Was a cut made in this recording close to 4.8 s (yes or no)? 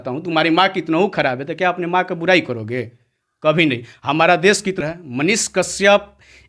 yes